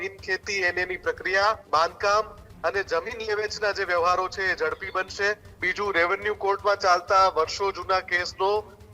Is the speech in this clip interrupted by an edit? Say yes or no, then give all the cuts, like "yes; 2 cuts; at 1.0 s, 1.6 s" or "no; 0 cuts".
yes; 2 cuts; at 1.6 s, 5.6 s